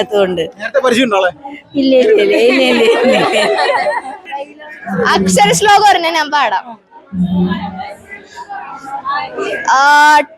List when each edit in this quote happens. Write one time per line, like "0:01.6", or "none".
0:04.3